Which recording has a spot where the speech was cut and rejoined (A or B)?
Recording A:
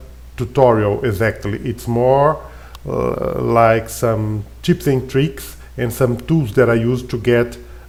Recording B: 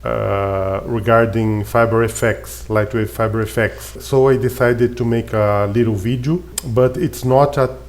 B